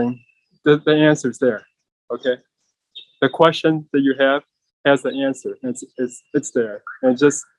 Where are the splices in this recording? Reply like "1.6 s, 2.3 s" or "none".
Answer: none